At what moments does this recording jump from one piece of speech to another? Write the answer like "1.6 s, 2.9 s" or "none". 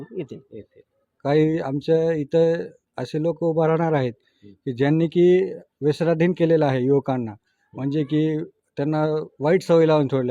1.1 s